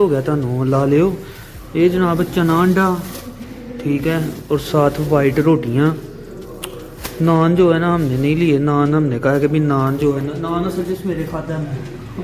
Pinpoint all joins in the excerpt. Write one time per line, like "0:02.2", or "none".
none